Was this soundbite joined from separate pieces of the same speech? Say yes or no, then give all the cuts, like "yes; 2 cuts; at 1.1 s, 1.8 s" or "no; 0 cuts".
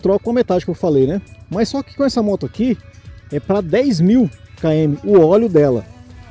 no; 0 cuts